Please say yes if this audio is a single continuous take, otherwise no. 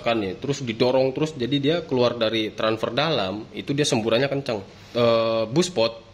no